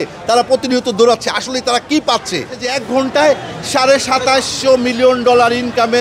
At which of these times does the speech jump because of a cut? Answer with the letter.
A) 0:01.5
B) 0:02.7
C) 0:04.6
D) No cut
B